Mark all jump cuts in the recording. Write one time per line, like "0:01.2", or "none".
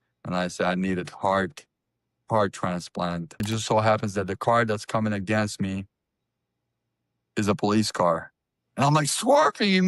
0:03.4